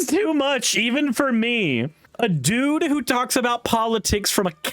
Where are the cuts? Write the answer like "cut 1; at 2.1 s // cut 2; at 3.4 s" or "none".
cut 1; at 2.0 s